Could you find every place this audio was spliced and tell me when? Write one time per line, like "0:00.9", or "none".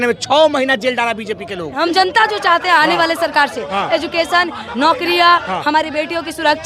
0:01.7